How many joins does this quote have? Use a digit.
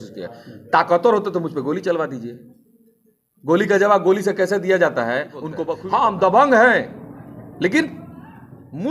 1